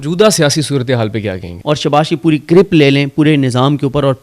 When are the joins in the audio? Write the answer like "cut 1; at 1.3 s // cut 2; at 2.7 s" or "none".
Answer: cut 1; at 1.5 s